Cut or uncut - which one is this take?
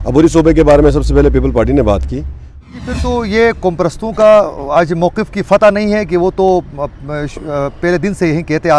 cut